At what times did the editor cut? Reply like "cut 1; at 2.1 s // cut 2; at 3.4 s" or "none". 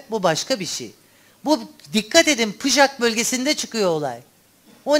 none